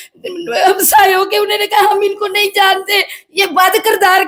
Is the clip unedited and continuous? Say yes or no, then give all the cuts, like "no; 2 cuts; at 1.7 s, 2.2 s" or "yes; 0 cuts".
yes; 0 cuts